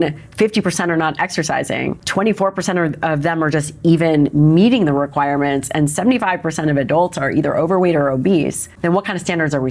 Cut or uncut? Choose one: cut